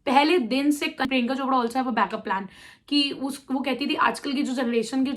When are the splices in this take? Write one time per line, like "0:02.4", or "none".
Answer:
0:01.0